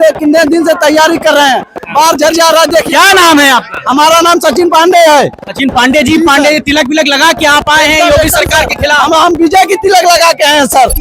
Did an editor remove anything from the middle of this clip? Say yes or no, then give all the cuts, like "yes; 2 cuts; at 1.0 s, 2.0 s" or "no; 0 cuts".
no; 0 cuts